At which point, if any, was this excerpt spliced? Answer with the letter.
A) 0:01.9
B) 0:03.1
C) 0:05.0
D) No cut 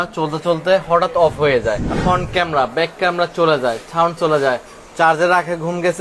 A